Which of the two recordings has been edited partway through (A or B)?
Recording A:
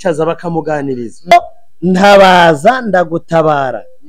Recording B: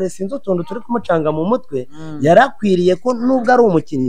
A